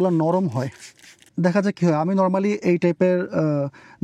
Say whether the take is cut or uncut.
cut